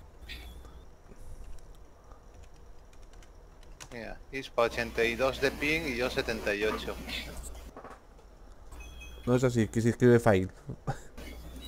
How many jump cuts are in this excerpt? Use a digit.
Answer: 0